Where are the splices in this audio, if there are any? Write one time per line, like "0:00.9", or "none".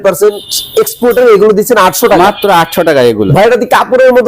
0:03.3